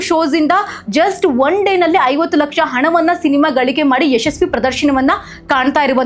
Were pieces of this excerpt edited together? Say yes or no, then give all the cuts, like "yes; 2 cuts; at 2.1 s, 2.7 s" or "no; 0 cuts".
no; 0 cuts